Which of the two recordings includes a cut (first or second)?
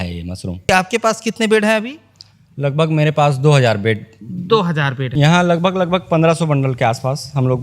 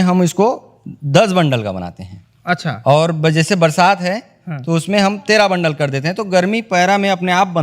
first